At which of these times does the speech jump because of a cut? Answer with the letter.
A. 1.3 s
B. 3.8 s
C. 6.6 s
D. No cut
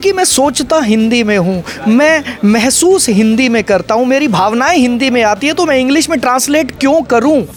D